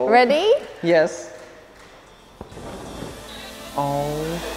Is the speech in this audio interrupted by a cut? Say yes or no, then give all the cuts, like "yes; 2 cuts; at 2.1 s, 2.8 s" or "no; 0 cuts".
yes; 1 cut; at 2.5 s